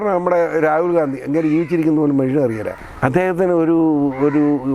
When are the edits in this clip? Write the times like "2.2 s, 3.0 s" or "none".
2.7 s